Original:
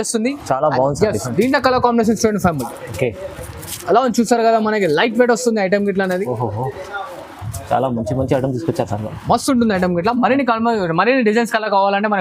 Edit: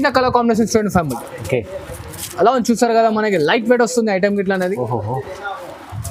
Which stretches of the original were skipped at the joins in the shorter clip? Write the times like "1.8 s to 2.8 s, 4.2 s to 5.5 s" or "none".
none

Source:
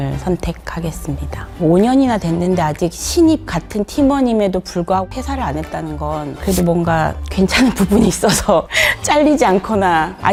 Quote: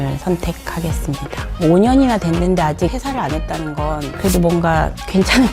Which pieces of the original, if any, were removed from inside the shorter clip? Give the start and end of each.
3.0 s to 5.2 s

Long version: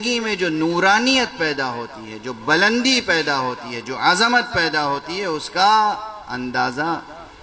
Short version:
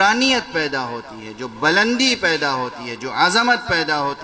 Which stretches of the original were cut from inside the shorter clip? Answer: none

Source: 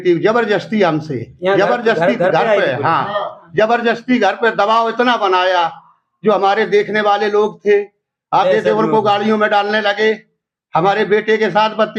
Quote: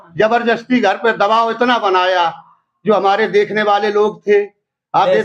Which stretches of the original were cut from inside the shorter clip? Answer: none

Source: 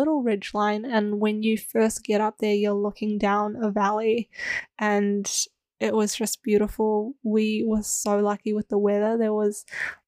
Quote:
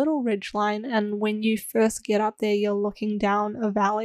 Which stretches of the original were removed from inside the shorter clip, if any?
none

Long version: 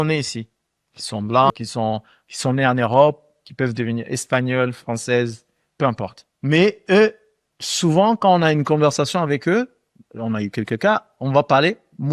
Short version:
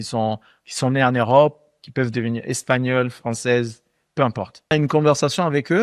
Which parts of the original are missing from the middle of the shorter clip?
6.3 s to 8.5 s

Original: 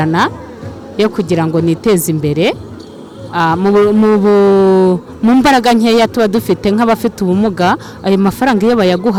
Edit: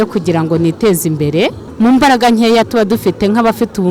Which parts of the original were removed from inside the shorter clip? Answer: 2.7 s to 5.1 s

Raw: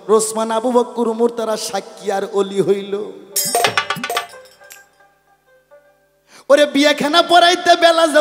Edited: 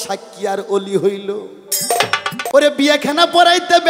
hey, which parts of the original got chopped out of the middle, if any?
4.1 s to 6.4 s

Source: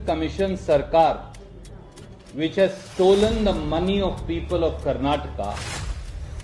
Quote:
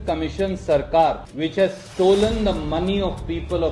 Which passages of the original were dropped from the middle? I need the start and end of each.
1.3 s to 2.3 s

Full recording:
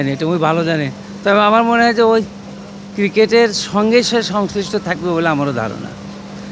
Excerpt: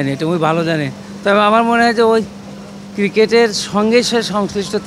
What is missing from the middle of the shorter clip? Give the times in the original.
none

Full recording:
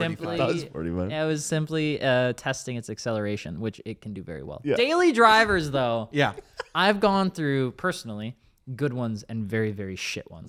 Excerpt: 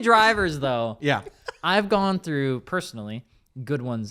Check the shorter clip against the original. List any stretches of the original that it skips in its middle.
none

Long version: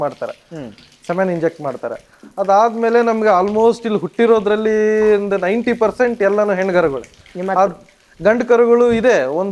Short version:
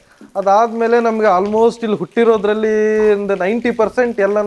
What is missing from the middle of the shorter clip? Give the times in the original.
none

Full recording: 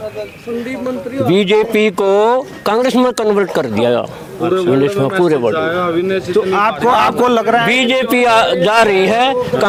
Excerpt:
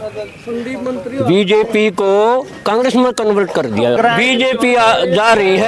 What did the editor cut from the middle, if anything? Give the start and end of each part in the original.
4.0 s to 7.4 s

